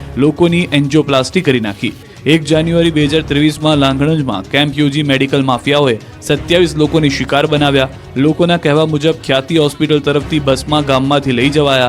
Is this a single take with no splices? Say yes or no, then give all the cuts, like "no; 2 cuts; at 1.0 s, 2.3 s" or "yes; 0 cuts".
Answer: no; 1 cut; at 5.0 s